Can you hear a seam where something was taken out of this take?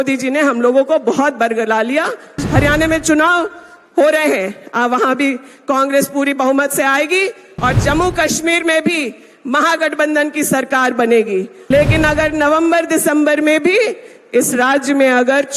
yes; 2 cuts; at 2.4 s, 11.6 s

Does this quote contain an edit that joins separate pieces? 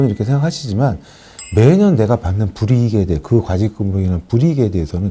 no; 0 cuts

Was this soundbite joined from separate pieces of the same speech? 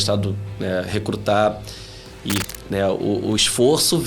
yes; 1 cut; at 2.5 s

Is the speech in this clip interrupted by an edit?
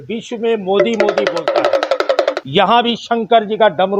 yes; 1 cut; at 2.4 s

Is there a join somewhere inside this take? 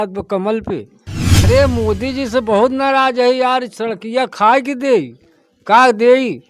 yes; 1 cut; at 1.5 s

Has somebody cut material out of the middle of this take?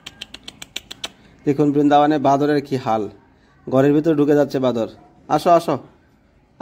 no; 0 cuts

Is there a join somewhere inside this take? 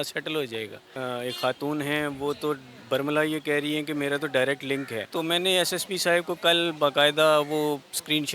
yes; 2 cuts; at 0.9 s, 5.1 s

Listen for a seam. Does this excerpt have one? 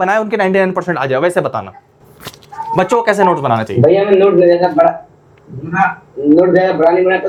no; 0 cuts

